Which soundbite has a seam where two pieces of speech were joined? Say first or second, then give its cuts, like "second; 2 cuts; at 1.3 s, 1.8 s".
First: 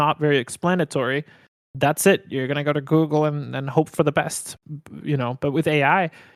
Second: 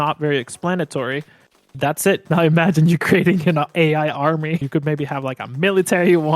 second; 2 cuts; at 2.2 s, 4.6 s